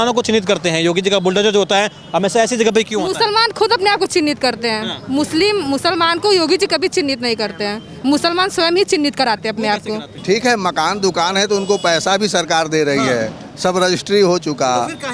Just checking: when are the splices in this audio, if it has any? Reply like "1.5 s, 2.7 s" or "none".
10.1 s